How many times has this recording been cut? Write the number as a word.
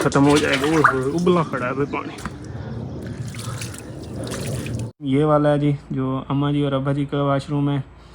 one